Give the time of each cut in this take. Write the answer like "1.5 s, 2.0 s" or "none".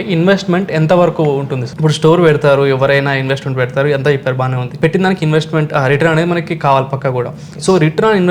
1.6 s, 4.7 s